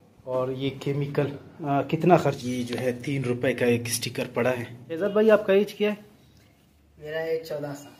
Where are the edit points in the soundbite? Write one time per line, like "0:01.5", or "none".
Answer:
0:02.4
0:05.0

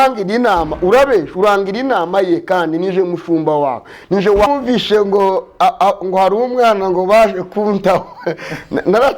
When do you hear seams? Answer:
0:04.5

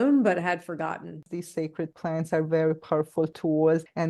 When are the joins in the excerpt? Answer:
0:01.2

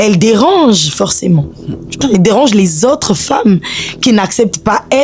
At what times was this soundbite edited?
0:01.8

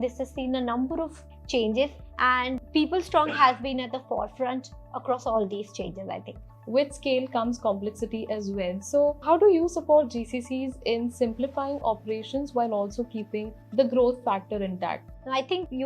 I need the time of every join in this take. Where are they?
0:06.5

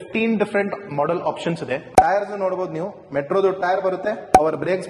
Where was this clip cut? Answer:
0:01.8

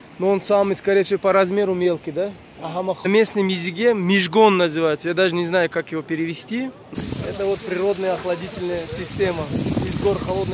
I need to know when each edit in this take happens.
0:03.1
0:06.9

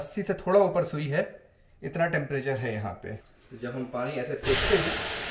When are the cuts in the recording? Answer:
0:03.2

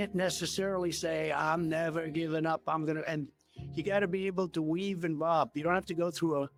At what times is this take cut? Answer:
none

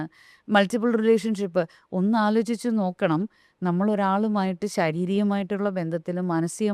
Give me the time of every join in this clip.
none

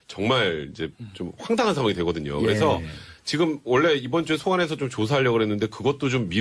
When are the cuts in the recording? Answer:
0:04.8

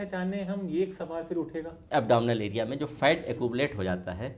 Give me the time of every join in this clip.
0:01.8

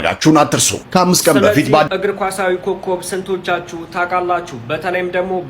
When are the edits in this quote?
0:01.9

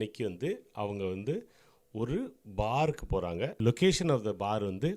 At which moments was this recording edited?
0:03.6

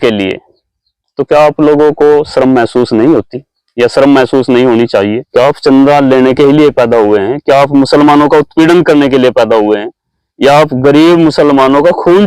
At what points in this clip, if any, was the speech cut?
0:05.2

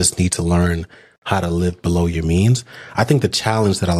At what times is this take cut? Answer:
none

